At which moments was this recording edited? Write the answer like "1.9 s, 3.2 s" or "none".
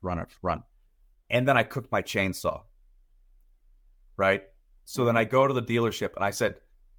none

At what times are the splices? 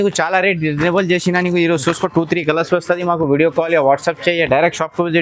none

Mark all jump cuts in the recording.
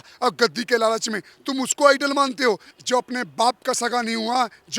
2.7 s

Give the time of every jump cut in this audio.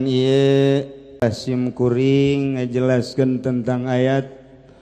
1.2 s

